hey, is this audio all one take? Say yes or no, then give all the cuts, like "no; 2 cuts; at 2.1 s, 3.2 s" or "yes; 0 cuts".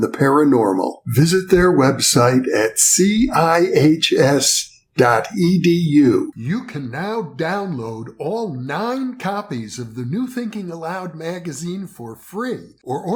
yes; 0 cuts